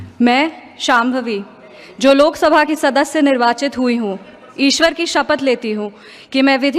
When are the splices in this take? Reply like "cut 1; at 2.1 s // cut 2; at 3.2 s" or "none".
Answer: none